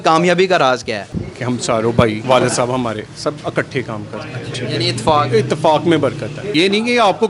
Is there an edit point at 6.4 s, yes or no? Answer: yes